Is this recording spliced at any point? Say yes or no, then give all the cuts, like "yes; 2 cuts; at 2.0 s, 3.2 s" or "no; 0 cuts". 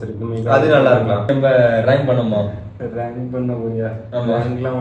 yes; 1 cut; at 1.2 s